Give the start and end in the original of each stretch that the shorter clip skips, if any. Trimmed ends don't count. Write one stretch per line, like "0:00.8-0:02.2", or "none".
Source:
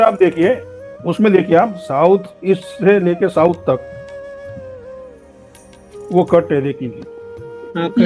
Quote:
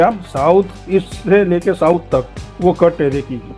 0:04.0-0:05.9